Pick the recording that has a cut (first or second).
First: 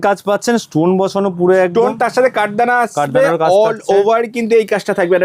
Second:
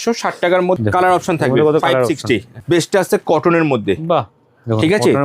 second